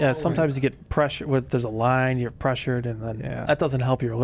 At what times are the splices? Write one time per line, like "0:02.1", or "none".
none

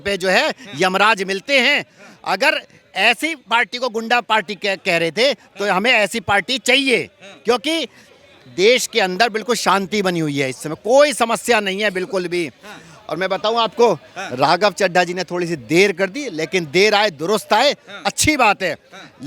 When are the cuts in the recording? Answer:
none

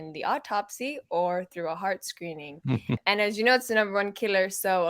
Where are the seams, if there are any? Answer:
0:03.0

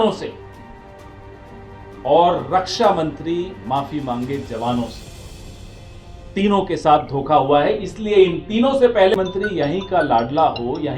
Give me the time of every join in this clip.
0:09.1

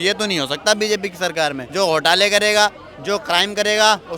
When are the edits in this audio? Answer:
0:01.6

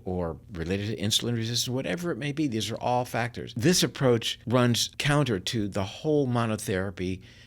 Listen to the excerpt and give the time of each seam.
0:03.5
0:04.7

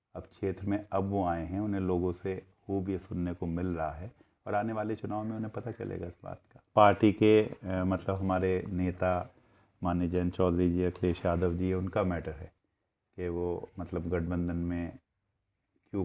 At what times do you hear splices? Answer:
0:06.7

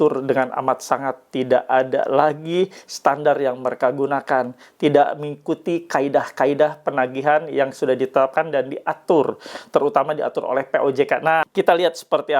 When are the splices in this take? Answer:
0:11.5

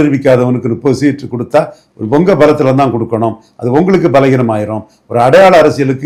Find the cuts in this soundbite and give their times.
none

